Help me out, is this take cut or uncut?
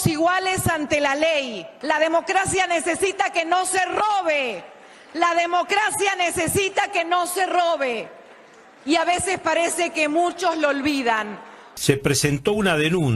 uncut